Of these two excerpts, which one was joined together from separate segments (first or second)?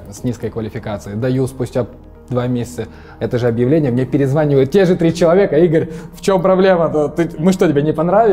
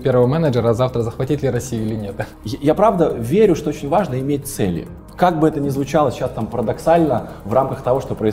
second